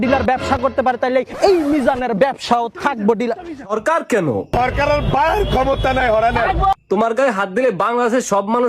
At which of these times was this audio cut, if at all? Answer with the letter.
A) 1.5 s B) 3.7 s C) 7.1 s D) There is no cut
B